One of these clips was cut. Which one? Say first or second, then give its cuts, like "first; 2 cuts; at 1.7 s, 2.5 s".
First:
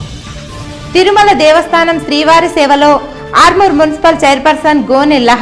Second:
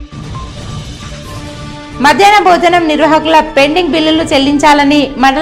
second; 1 cut; at 1.5 s